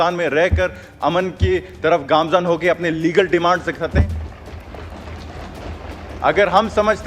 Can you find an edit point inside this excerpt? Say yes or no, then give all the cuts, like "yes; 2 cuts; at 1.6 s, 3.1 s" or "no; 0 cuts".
no; 0 cuts